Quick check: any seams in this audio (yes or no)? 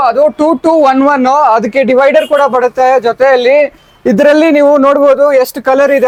no